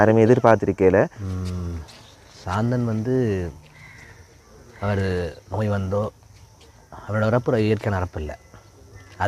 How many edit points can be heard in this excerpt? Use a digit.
1